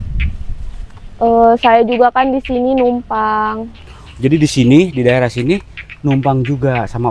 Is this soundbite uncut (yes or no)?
yes